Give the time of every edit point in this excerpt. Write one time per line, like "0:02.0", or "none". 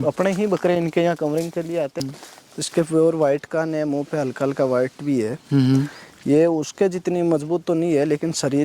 0:02.0